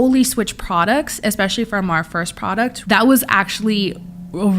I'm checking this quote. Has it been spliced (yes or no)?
yes